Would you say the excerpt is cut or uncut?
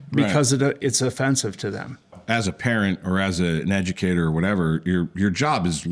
cut